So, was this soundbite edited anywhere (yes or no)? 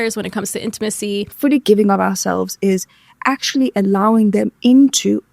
yes